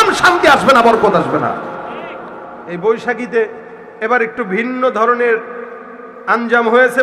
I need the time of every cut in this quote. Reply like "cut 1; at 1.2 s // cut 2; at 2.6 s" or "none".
cut 1; at 2.2 s